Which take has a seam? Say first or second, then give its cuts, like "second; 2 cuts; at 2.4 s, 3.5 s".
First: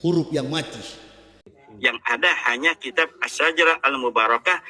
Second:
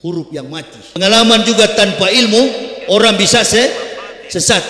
second; 1 cut; at 1.0 s